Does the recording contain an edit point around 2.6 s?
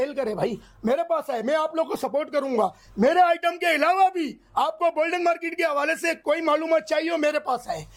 no; 0 cuts

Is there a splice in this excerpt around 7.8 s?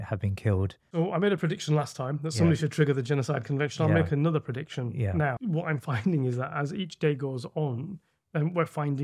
no; 2 cuts; at 0.9 s, 5.4 s

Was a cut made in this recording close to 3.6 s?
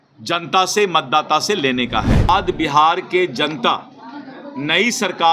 no; 1 cut; at 2.3 s

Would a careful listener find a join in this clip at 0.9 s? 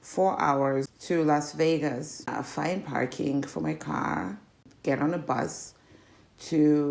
yes; 3 cuts; at 0.9 s, 2.3 s, 4.7 s

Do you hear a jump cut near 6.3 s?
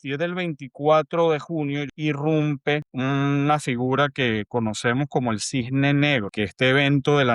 yes; 3 cuts; at 1.9 s, 2.9 s, 6.3 s

